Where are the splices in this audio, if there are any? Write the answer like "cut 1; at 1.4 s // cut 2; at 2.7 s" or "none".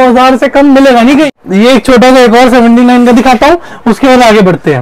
cut 1; at 1.3 s